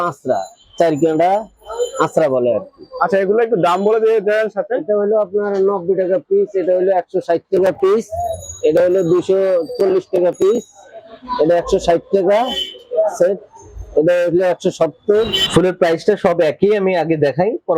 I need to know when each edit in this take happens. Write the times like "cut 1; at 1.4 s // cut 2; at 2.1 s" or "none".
cut 1; at 15.4 s

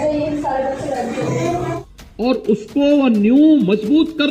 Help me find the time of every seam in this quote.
cut 1; at 1.7 s

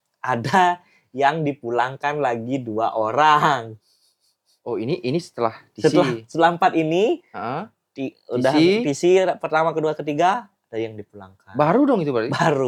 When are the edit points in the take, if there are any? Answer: none

